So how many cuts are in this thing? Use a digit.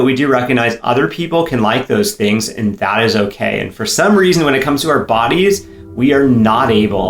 0